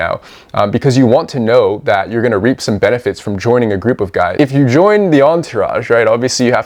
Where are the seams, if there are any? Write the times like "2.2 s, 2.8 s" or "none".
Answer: 4.3 s